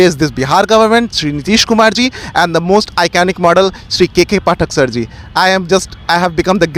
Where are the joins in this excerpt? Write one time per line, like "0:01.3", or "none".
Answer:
none